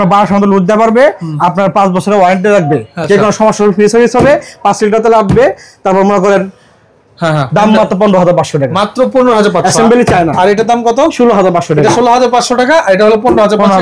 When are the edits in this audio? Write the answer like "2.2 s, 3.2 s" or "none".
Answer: none